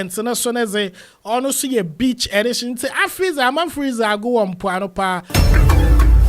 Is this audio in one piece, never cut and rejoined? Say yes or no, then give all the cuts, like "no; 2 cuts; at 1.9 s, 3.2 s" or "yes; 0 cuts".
no; 1 cut; at 5.3 s